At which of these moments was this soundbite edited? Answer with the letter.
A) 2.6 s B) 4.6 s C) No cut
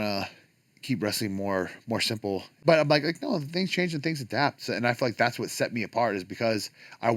A